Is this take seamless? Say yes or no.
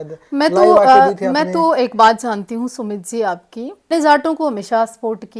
no